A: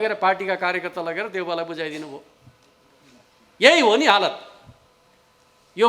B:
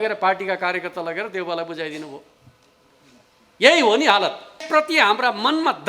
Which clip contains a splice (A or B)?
B